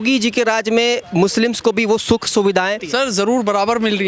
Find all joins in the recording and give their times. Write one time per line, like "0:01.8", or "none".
0:02.8